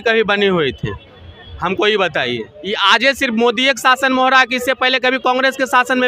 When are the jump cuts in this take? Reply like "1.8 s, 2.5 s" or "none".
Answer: 2.5 s

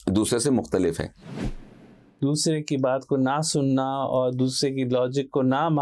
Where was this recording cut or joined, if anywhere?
1.6 s

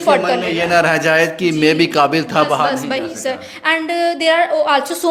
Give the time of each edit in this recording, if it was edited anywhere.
none

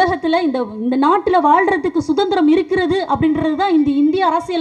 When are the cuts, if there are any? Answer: none

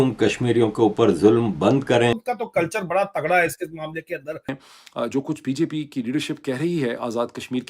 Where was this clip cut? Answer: 2.2 s, 4.6 s

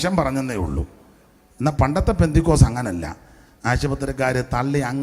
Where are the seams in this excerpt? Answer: none

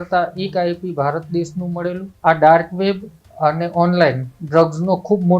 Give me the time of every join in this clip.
2.1 s

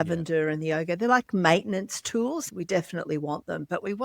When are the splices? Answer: 2.4 s

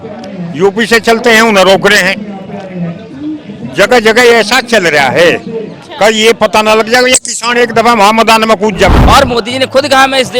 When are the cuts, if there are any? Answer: 9.0 s

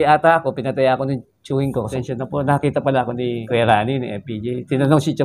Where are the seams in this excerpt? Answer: 1.9 s, 3.4 s

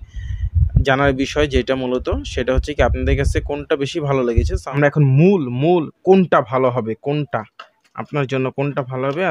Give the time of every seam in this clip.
4.6 s

